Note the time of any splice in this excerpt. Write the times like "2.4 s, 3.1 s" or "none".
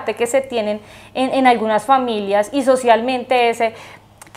none